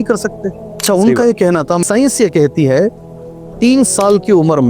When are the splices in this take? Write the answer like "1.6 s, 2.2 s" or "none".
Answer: 0.8 s, 1.8 s